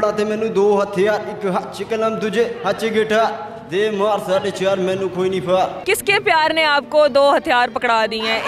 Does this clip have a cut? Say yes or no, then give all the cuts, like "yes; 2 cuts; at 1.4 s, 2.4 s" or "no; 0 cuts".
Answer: yes; 1 cut; at 5.8 s